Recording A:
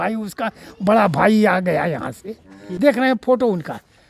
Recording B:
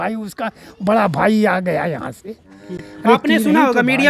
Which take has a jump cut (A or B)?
A